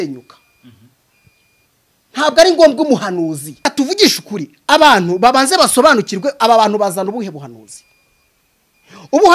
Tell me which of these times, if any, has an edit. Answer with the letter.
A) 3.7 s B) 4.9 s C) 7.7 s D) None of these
A